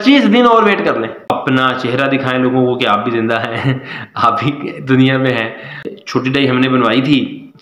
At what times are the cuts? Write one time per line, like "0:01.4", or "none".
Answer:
0:01.3
0:05.9

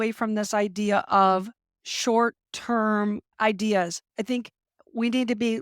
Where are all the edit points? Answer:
0:03.4

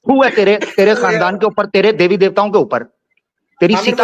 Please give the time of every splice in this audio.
0:03.0

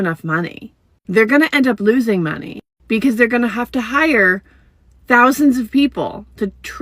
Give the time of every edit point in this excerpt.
0:01.1

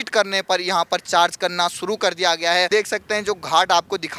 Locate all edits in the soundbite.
0:02.7

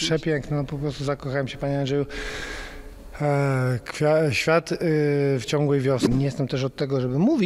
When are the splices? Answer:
0:06.0

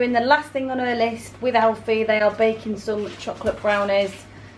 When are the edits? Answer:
none

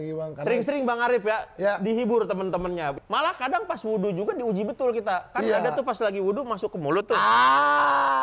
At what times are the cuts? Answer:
0:02.9

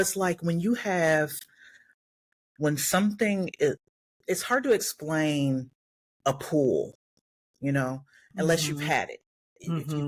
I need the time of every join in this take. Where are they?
none

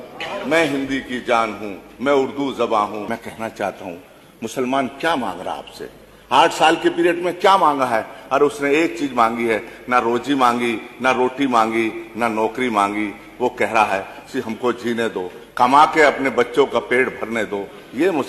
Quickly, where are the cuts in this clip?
0:03.1

